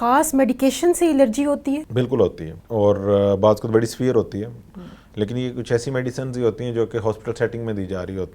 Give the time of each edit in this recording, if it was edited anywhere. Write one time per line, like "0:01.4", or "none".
0:01.9
0:02.5